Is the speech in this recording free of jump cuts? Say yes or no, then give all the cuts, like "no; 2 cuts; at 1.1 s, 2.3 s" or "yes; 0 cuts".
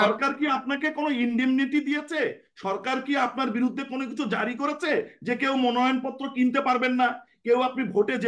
yes; 0 cuts